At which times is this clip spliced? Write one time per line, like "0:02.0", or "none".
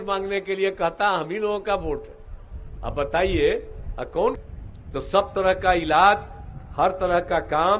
0:04.4

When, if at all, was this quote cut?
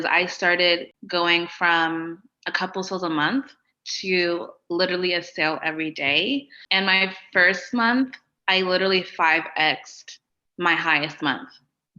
0:01.0
0:06.6

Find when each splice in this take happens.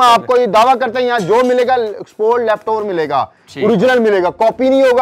none

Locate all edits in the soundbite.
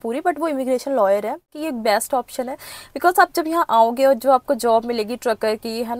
0:01.4

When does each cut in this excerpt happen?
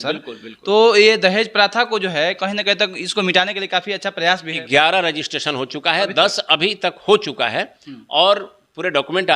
0:04.6

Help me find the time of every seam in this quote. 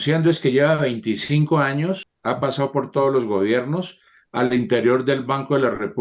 0:02.1

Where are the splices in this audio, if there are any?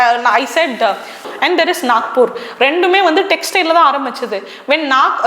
0:01.2

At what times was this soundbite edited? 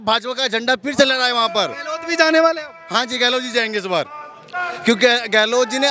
none

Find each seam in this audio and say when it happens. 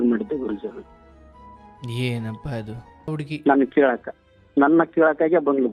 0:03.1

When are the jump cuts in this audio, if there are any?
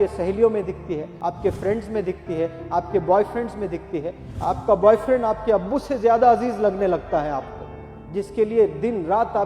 0:01.1

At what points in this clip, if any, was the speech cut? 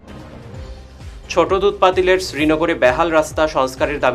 0:00.9

